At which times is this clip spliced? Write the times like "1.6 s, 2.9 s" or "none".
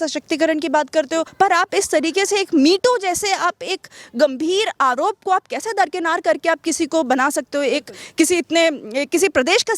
1.3 s